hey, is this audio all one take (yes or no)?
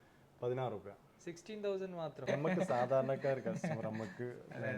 no